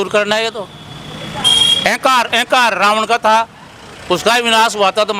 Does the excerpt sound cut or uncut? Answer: uncut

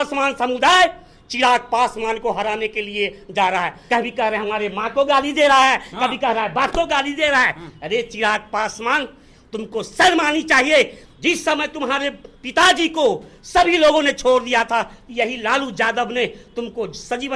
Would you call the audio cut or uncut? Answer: cut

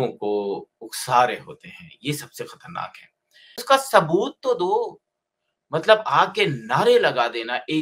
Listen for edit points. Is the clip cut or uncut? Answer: cut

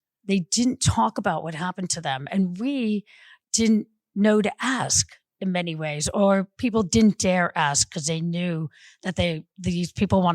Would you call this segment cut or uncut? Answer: cut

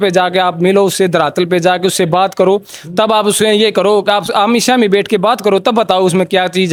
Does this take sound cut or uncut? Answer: uncut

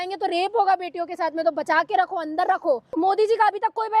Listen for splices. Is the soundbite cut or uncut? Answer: cut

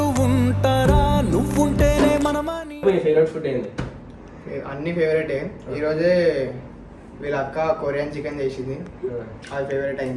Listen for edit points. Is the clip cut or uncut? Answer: cut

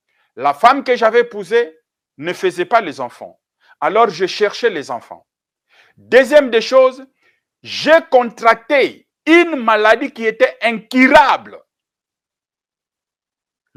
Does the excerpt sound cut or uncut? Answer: uncut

